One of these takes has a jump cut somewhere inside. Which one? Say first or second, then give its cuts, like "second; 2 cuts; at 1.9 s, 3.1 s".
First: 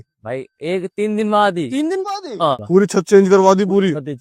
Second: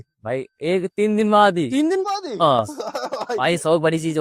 first; 1 cut; at 2.6 s